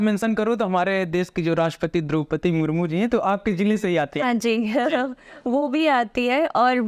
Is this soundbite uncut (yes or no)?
yes